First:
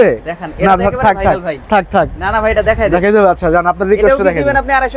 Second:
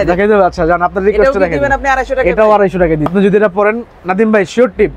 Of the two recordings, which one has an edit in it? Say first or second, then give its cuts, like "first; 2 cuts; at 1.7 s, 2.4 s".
second; 1 cut; at 3.1 s